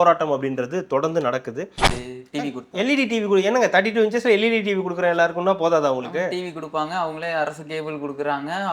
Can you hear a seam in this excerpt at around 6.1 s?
no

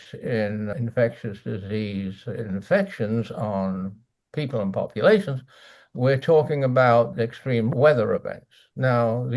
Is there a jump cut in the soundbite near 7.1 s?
yes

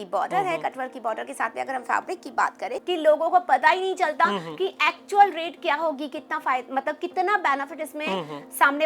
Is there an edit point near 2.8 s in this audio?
yes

